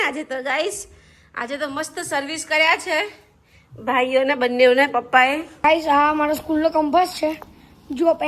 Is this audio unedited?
no; 1 cut; at 5.5 s

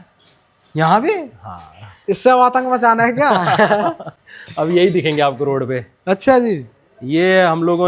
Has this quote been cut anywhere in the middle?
no; 0 cuts

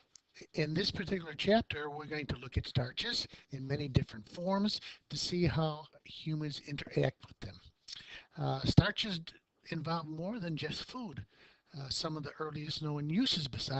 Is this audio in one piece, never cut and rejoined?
no; 1 cut; at 12.8 s

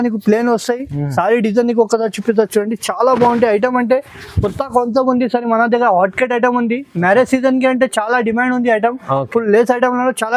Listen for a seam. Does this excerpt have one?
no; 0 cuts

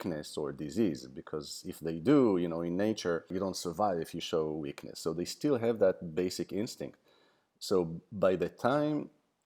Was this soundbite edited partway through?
yes; 1 cut; at 3.3 s

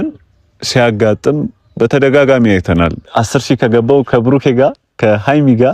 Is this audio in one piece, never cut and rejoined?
no; 1 cut; at 3.0 s

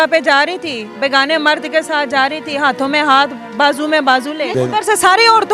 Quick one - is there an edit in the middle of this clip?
yes; 1 cut; at 4.5 s

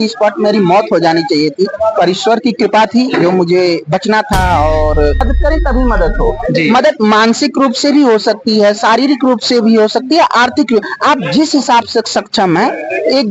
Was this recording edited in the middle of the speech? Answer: yes; 1 cut; at 5.3 s

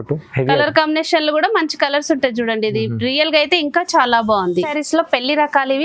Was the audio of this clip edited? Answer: yes; 1 cut; at 4.7 s

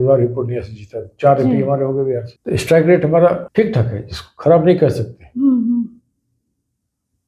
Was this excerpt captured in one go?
no; 2 cuts; at 2.3 s, 3.4 s

